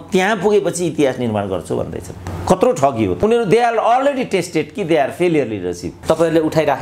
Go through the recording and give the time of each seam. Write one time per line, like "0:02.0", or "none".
0:03.2
0:05.9